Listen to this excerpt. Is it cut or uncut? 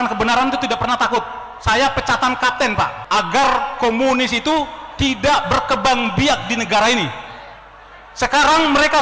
cut